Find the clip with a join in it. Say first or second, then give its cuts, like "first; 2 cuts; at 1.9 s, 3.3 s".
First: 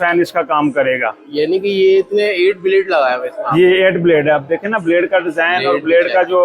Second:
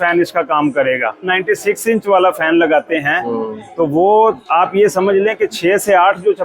second; 1 cut; at 1.3 s